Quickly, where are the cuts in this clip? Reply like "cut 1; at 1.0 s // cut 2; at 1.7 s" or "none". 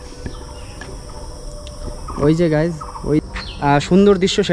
cut 1; at 3.2 s